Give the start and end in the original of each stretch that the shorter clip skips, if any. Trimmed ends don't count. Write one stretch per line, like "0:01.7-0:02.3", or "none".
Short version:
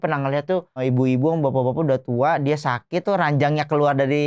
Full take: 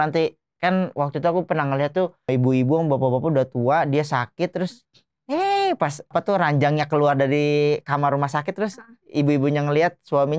0:04.5-0:06.2